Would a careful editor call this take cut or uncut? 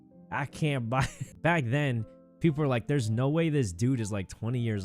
cut